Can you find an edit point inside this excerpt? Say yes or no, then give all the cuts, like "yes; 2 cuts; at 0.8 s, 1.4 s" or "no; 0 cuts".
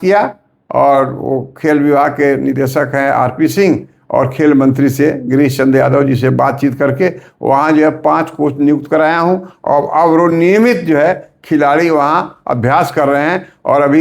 no; 0 cuts